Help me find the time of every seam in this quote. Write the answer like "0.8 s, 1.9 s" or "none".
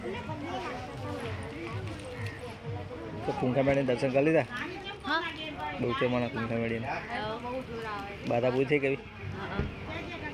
none